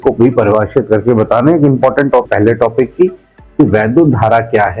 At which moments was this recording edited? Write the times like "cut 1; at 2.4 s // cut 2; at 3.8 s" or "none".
cut 1; at 2.3 s